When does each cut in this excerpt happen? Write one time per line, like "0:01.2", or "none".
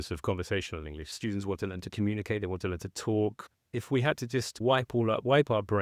0:01.1
0:03.7